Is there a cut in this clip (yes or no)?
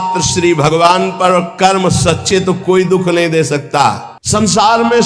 yes